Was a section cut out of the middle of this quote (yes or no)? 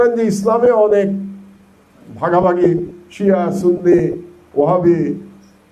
no